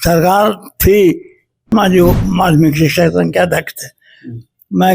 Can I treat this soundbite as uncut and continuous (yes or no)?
no